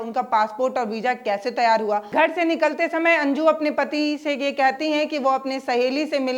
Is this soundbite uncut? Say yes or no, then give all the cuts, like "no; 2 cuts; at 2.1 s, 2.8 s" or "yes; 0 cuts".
no; 1 cut; at 2.1 s